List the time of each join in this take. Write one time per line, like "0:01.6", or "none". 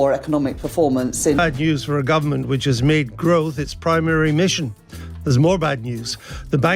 0:01.4

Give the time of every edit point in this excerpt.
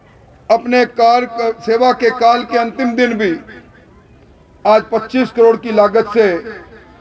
none

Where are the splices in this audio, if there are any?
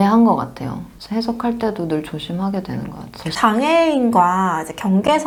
none

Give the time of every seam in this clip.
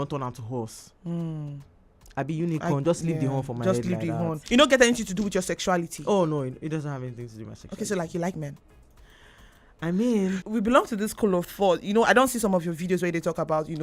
0:04.4
0:10.4

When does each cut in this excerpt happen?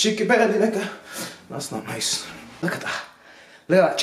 0:02.6

